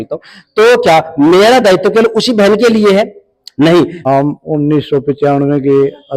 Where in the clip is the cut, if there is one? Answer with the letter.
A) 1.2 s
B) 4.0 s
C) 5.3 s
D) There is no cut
B